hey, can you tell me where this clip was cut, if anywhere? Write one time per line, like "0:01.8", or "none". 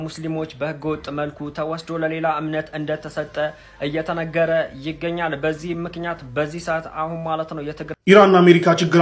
0:07.9